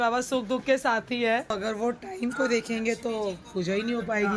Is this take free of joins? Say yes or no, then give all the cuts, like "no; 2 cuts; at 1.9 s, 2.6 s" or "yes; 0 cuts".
no; 1 cut; at 1.5 s